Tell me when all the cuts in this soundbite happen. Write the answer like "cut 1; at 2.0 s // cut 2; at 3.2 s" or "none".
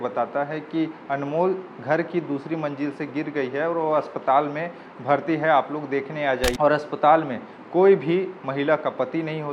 cut 1; at 6.5 s

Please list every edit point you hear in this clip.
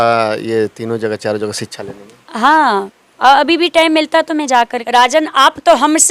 cut 1; at 4.8 s

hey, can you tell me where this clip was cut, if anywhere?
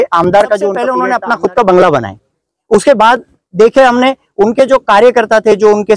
cut 1; at 0.9 s

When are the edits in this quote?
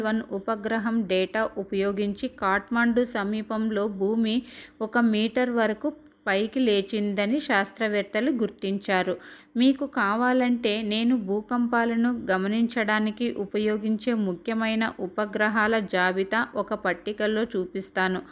none

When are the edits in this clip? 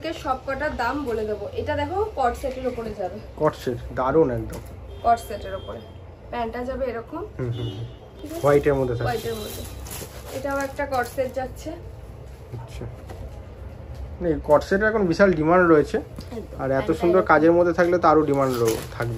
none

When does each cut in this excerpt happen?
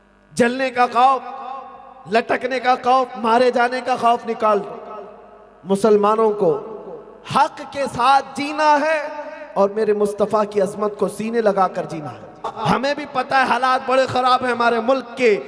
cut 1; at 12.5 s

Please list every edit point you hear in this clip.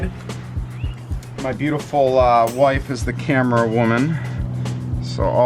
none

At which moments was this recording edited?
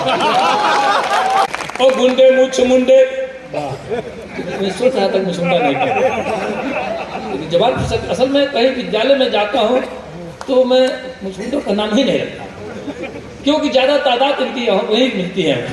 cut 1; at 1.5 s

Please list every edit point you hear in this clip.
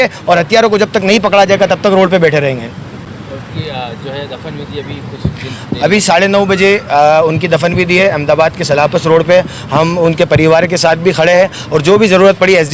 none

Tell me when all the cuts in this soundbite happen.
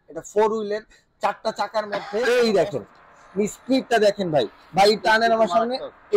cut 1; at 2.2 s

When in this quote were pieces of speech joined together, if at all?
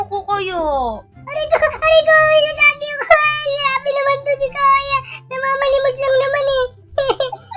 cut 1; at 1.1 s

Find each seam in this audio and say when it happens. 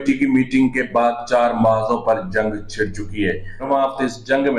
cut 1; at 3.7 s

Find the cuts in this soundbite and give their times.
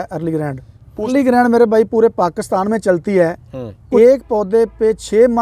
cut 1; at 1.1 s // cut 2; at 3.8 s

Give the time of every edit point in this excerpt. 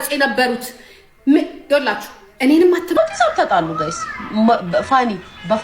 cut 1; at 3.0 s

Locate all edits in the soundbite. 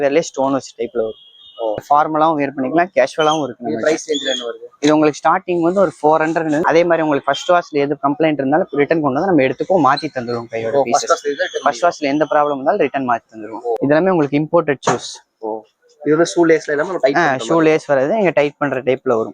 cut 1; at 1.8 s // cut 2; at 6.6 s // cut 3; at 13.8 s

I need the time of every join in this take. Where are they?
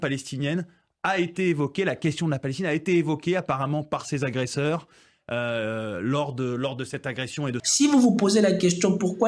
cut 1; at 7.6 s

